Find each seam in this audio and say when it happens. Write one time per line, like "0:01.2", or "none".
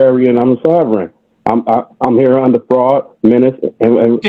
none